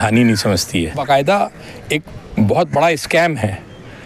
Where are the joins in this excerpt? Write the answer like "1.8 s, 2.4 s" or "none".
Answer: 1.0 s